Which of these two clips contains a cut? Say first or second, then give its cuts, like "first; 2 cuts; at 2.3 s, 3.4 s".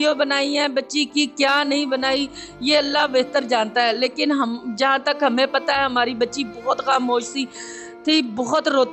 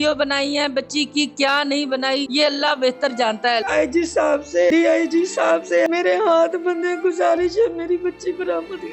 second; 4 cuts; at 2.3 s, 3.6 s, 4.7 s, 5.9 s